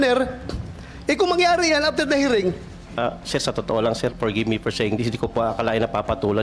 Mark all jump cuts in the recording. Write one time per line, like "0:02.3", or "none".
0:03.0